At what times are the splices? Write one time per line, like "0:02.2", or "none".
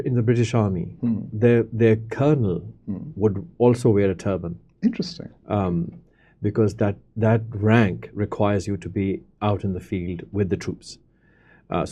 none